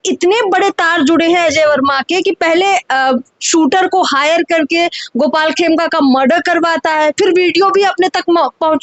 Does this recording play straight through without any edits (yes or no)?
yes